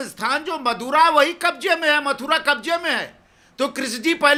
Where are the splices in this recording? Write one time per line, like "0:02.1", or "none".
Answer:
none